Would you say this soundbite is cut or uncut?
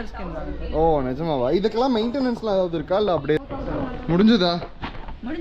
cut